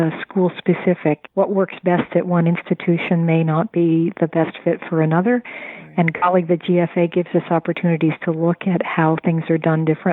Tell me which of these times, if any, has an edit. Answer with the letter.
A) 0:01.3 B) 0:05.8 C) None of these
A